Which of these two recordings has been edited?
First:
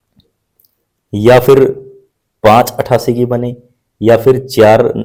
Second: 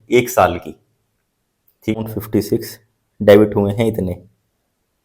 second; 1 cut; at 2.0 s

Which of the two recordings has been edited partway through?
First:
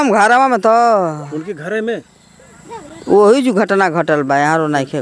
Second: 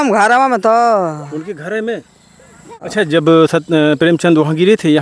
second; 1 cut; at 2.8 s

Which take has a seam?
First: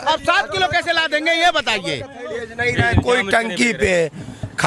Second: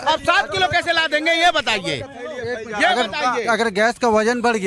first; 1 cut; at 2.3 s

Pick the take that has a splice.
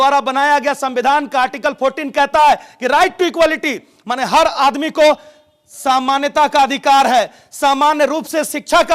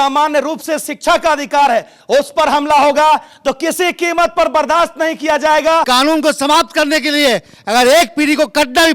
second; 1 cut; at 5.9 s

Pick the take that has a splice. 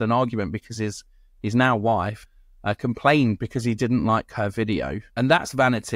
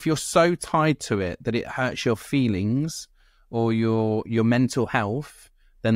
first; 2 cuts; at 2.2 s, 5.0 s

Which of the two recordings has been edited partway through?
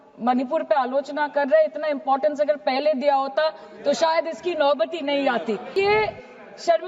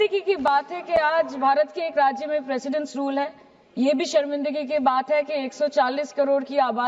first; 1 cut; at 5.7 s

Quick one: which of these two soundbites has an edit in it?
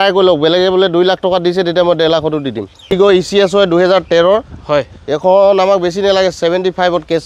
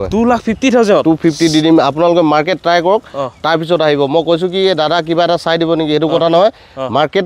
first; 1 cut; at 2.9 s

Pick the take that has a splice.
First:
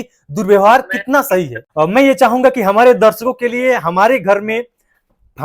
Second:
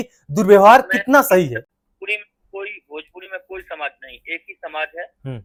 first; 1 cut; at 1.6 s

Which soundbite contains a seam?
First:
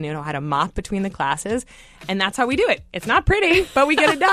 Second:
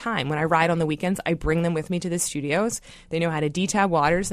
first; 1 cut; at 2.9 s

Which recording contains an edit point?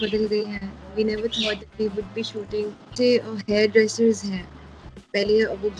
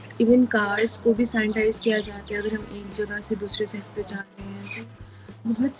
first; 1 cut; at 2.9 s

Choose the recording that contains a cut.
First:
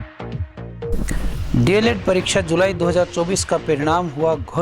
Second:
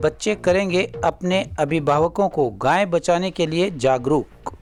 first; 1 cut; at 1.0 s

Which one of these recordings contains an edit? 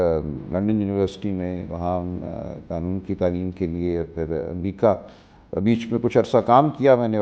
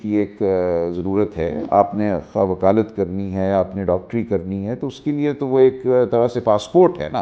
second; 1 cut; at 1.6 s

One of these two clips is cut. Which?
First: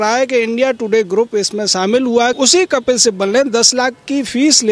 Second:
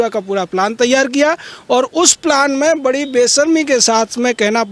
first; 1 cut; at 2.3 s

